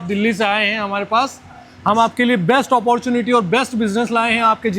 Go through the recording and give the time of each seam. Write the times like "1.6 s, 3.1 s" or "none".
none